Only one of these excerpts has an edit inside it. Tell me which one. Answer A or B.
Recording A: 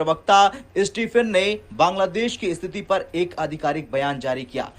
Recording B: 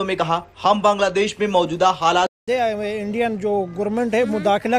B